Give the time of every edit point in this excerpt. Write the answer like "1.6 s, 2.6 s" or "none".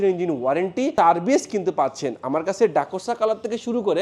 none